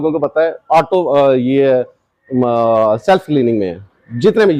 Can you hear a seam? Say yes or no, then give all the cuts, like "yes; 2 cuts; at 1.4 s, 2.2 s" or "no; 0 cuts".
no; 0 cuts